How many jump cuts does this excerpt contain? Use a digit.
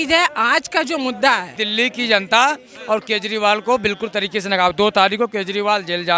1